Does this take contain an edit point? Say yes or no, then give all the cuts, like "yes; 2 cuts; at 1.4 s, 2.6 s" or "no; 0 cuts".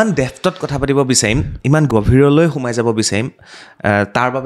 yes; 1 cut; at 1.9 s